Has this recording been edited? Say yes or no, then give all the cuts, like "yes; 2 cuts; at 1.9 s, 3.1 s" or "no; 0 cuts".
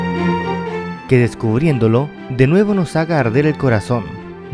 yes; 1 cut; at 0.9 s